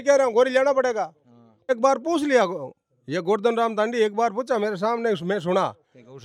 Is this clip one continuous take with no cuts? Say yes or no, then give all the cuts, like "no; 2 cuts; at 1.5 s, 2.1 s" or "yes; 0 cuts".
no; 1 cut; at 1.7 s